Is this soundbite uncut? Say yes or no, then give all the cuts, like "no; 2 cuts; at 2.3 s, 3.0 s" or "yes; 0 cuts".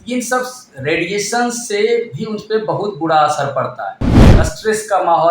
no; 1 cut; at 4.2 s